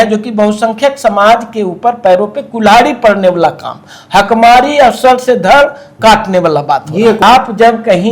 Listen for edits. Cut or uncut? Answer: cut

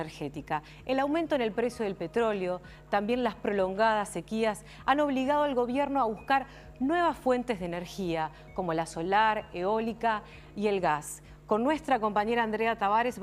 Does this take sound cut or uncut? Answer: uncut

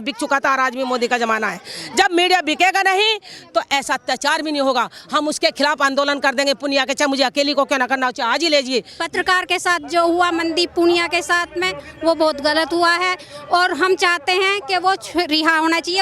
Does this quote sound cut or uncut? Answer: cut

